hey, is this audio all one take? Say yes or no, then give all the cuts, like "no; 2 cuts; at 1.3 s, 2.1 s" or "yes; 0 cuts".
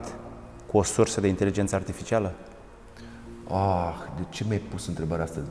yes; 0 cuts